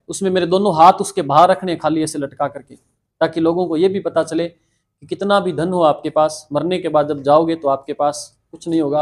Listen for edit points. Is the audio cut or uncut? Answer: uncut